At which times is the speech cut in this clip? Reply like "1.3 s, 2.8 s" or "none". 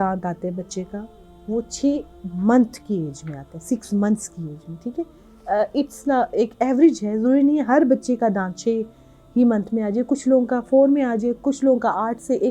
none